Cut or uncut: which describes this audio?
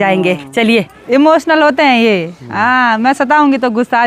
cut